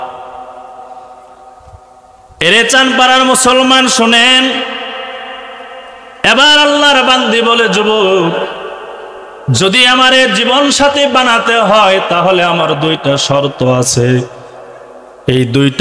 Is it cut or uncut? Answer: uncut